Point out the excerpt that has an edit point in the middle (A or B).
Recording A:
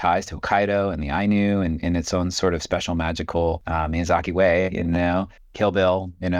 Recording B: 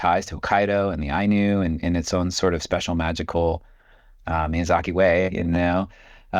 A